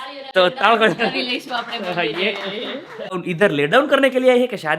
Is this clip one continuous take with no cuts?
no; 1 cut; at 3.2 s

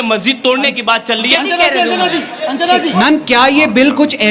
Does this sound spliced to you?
yes; 2 cuts; at 1.3 s, 2.9 s

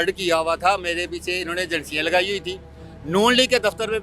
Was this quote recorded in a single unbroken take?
yes; 0 cuts

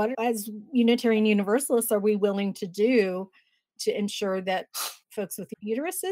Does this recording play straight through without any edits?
yes; 0 cuts

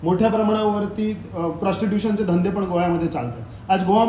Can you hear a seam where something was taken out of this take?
no; 0 cuts

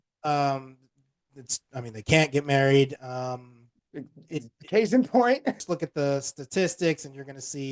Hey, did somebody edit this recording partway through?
yes; 1 cut; at 5.5 s

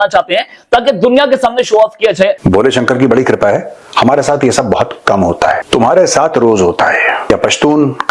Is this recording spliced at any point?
yes; 3 cuts; at 2.4 s, 5.6 s, 7.3 s

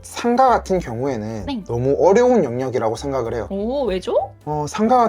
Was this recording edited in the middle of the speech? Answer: no; 0 cuts

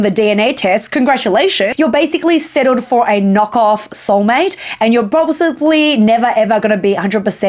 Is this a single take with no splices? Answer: no; 1 cut; at 1.7 s

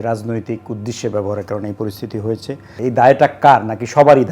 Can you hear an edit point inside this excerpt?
yes; 1 cut; at 2.8 s

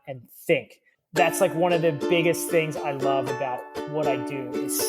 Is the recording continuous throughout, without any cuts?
yes; 0 cuts

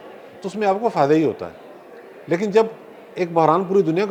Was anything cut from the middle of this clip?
no; 0 cuts

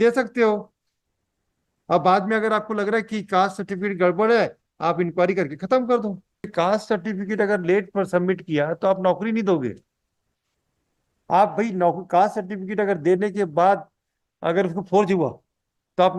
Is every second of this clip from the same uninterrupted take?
no; 1 cut; at 6.5 s

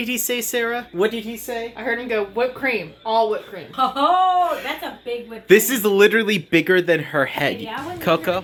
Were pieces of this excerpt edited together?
no; 0 cuts

